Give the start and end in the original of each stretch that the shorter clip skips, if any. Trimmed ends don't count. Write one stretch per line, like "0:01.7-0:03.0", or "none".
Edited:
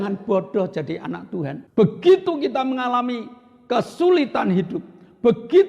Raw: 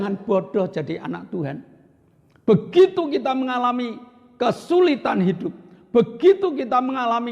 0:01.6-0:02.3